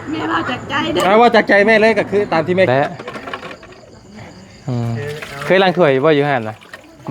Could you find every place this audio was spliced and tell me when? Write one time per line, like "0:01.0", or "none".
0:02.7